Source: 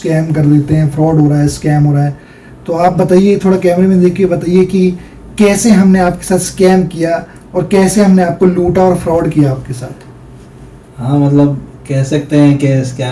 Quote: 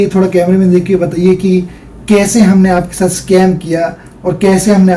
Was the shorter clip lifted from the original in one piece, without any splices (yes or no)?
yes